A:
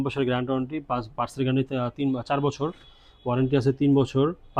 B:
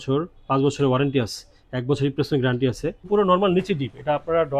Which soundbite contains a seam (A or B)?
B